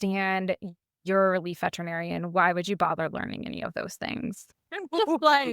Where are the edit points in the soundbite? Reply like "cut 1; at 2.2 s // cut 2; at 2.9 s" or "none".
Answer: cut 1; at 4.5 s